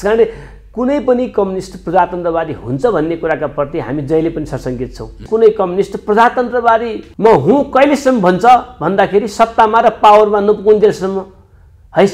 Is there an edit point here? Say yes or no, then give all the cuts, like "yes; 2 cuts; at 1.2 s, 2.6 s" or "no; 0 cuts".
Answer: yes; 2 cuts; at 5.2 s, 7.0 s